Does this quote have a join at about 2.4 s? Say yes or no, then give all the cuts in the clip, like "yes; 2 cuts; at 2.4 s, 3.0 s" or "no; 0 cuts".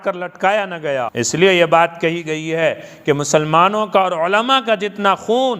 no; 1 cut; at 1.1 s